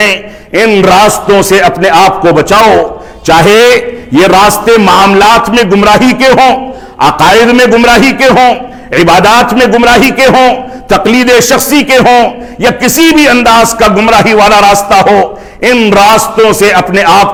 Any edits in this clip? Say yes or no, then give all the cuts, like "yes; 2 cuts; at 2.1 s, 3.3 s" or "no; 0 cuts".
no; 0 cuts